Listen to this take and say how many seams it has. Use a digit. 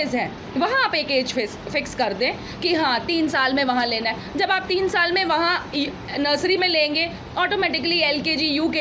0